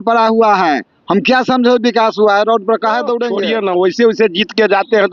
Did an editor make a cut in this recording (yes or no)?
yes